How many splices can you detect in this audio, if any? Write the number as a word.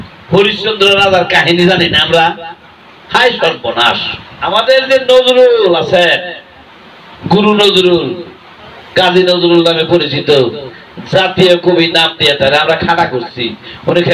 one